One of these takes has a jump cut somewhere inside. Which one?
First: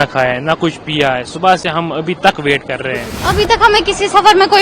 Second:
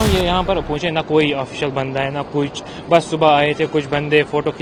first; 1 cut; at 3.1 s

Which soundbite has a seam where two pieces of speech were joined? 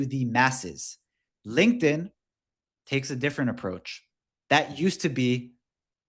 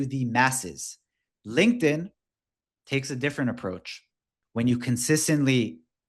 second; 1 cut; at 4.3 s

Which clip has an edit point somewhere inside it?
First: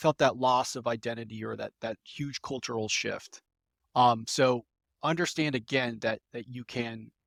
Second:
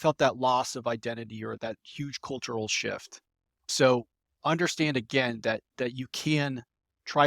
second; 3 cuts; at 1.6 s, 3.7 s, 5.7 s

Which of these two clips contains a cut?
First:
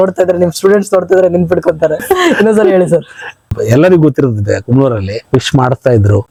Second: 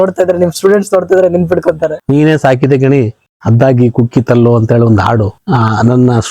second; 2 cuts; at 1.9 s, 5.4 s

